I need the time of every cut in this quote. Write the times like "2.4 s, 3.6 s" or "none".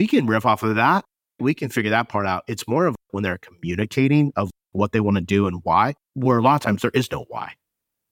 6.0 s